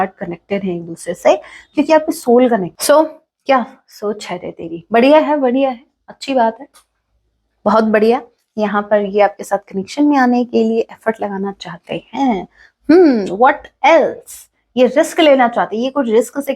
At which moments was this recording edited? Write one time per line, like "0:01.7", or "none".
0:02.7